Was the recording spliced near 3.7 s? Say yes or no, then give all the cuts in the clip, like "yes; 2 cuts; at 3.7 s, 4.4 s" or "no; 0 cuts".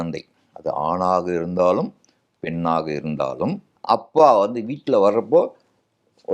yes; 1 cut; at 3.7 s